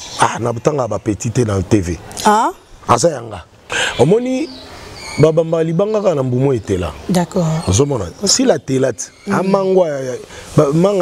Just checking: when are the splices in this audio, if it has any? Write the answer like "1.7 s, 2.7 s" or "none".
3.6 s